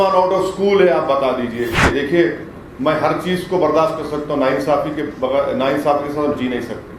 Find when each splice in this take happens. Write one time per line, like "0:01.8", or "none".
0:01.8

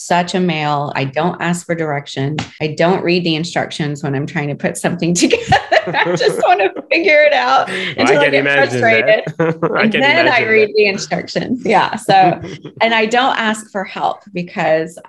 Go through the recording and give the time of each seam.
0:00.9
0:02.5

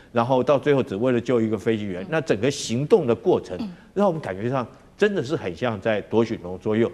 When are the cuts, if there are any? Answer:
none

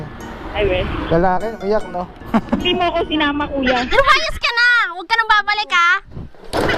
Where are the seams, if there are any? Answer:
0:03.9

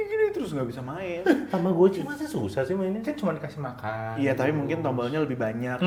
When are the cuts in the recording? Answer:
none

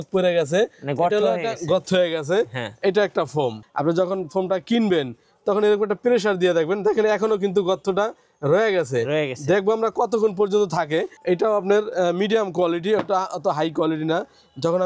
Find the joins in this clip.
0:03.6
0:11.1

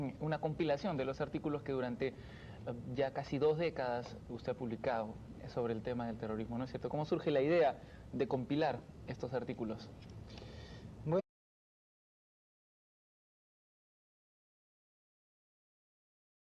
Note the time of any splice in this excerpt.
none

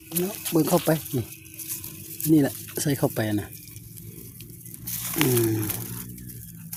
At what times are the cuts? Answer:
none

